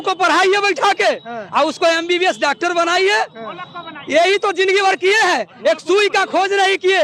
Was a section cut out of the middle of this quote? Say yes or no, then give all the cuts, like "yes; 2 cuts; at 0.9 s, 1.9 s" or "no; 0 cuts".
no; 0 cuts